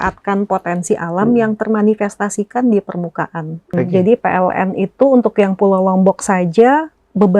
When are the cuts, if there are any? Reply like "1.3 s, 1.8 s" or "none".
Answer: 3.7 s